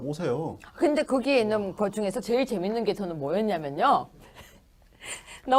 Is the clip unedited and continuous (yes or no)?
yes